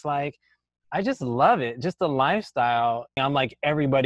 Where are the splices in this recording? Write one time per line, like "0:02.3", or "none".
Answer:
0:03.2